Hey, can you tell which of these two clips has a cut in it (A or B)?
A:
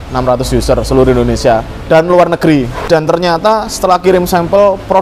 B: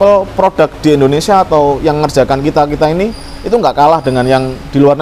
A